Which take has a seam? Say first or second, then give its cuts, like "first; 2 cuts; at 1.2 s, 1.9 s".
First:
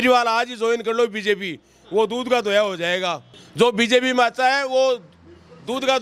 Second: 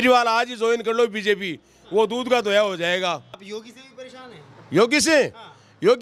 second; 1 cut; at 3.4 s